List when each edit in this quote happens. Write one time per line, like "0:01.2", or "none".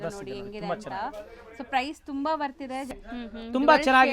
0:02.9